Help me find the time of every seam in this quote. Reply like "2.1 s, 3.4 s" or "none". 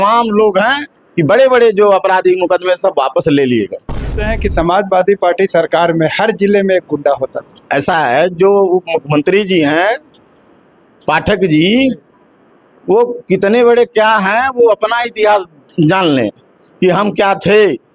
4.1 s